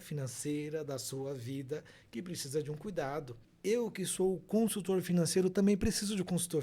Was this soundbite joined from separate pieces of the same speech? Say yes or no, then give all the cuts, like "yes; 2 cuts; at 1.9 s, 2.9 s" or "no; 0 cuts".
yes; 1 cut; at 3.4 s